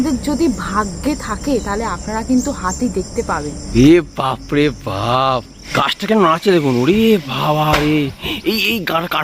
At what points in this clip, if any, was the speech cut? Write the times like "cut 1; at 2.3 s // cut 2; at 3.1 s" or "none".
cut 1; at 3.6 s // cut 2; at 5.6 s